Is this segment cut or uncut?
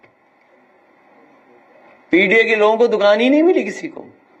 uncut